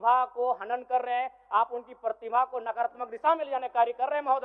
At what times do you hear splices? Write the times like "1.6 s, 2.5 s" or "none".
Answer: none

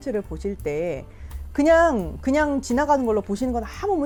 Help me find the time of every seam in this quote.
none

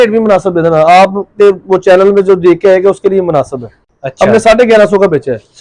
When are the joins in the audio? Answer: none

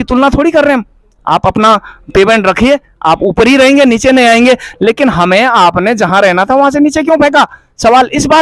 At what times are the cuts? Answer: none

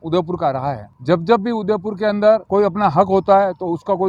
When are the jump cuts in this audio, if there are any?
0.9 s, 2.4 s

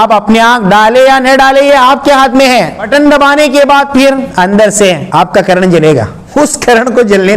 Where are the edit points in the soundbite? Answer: 2.9 s, 4.3 s, 5.0 s, 6.2 s

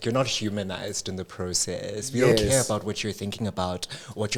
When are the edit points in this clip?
none

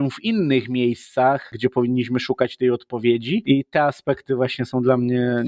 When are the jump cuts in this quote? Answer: 1.5 s, 3.4 s

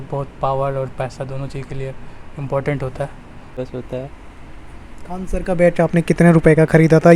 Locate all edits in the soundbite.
3.6 s

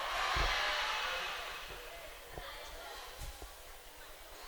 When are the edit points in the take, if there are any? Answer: none

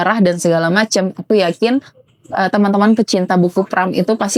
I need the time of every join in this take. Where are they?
none

